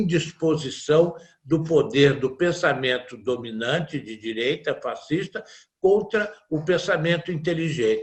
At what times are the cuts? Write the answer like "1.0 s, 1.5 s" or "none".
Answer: none